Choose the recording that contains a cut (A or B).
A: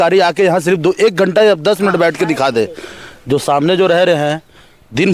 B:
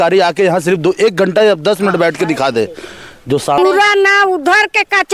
B